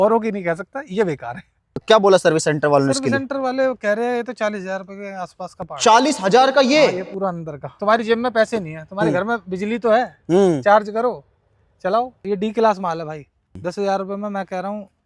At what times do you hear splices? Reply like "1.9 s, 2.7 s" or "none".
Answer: 1.8 s, 7.6 s, 12.2 s, 13.6 s